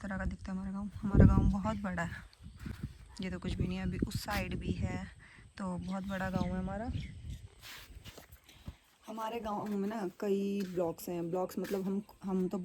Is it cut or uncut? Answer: uncut